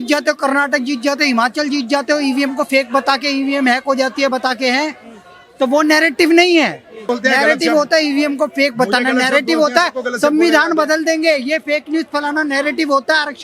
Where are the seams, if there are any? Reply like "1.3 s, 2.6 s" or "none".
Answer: 7.1 s

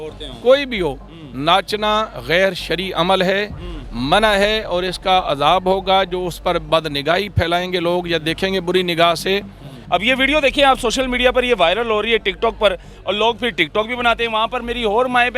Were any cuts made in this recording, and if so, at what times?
9.7 s

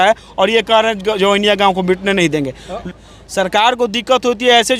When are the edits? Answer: 2.8 s

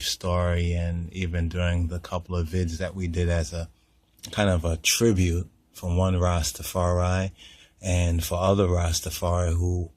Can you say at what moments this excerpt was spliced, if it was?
2.4 s

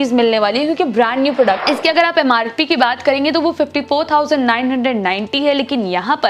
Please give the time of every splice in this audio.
1.6 s

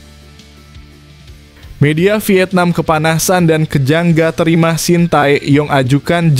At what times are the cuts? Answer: 1.8 s

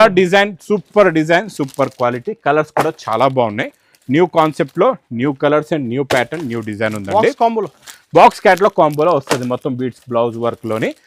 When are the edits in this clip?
none

